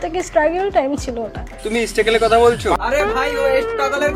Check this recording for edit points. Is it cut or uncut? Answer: uncut